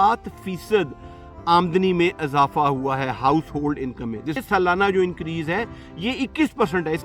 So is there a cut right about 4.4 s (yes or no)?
yes